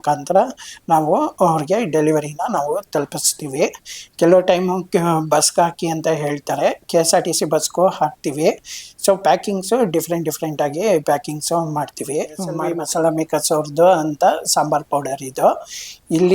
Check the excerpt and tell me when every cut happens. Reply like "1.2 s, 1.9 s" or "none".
13.0 s